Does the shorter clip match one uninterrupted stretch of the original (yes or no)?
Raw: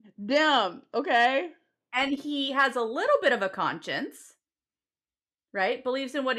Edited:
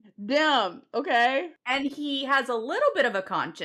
no